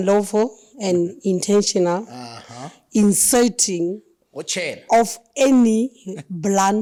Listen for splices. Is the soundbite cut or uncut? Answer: uncut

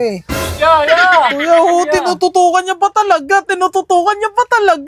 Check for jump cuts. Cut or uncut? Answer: uncut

